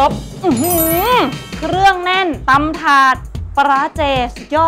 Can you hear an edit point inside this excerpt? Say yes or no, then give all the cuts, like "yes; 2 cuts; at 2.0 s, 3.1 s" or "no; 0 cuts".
no; 0 cuts